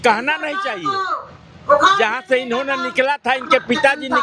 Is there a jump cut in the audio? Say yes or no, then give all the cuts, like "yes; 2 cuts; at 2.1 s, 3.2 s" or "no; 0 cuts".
no; 0 cuts